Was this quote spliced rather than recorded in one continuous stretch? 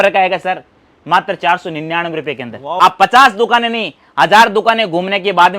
yes; 1 cut; at 2.8 s

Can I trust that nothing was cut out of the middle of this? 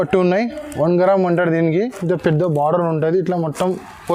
yes; 0 cuts

